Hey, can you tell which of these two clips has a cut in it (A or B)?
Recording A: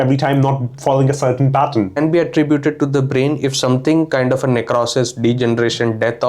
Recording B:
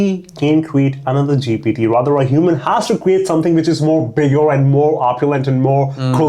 A